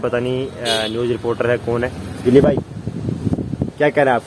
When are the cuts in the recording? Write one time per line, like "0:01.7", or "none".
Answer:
0:02.2